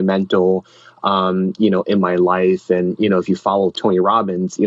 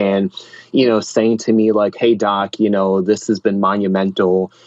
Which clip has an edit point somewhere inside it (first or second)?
first